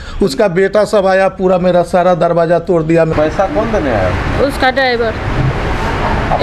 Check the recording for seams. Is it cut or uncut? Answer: cut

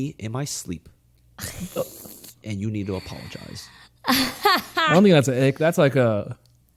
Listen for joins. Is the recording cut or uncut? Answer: uncut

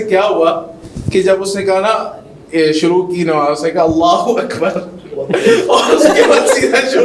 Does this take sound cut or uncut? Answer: uncut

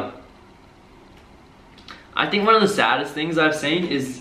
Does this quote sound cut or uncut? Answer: uncut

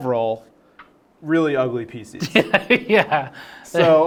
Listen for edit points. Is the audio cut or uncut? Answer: uncut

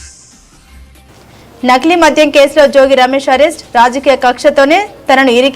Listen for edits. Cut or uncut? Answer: uncut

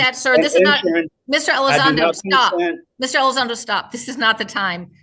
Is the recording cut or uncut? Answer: uncut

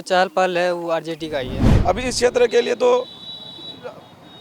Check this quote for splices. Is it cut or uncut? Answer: cut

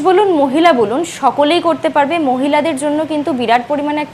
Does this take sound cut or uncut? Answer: uncut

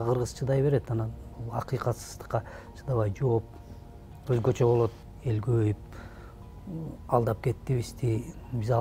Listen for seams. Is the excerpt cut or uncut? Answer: cut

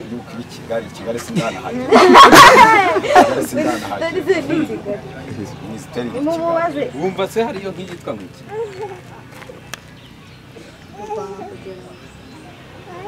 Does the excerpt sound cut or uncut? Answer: uncut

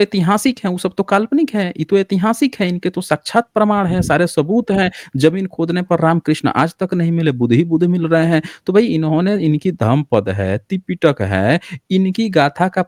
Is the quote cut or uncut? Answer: uncut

